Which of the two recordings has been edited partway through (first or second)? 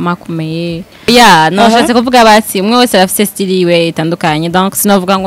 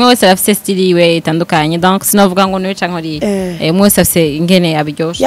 first